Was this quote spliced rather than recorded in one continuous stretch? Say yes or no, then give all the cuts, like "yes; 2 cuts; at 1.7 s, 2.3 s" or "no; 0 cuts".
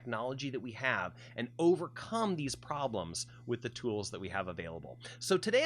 no; 0 cuts